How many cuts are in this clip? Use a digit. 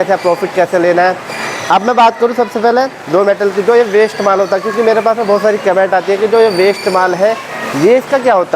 0